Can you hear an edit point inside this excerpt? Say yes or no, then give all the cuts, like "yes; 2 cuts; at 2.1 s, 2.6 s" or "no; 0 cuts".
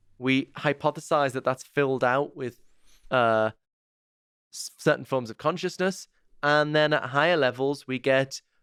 no; 0 cuts